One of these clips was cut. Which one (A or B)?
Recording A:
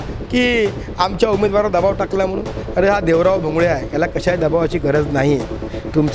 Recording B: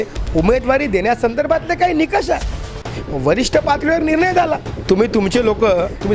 B